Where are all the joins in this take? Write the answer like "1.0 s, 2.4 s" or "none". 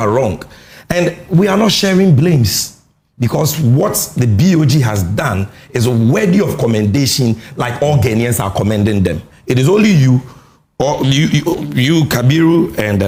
none